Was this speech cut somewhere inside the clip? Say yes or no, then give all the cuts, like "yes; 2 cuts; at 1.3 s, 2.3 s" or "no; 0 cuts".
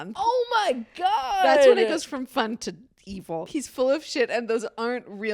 yes; 1 cut; at 3.5 s